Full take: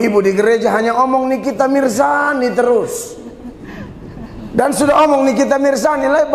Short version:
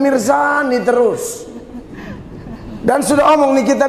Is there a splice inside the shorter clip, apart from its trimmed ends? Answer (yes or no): no